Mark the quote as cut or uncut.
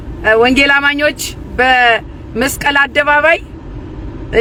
uncut